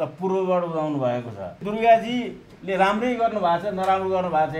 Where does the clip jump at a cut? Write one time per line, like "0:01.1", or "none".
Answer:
0:01.6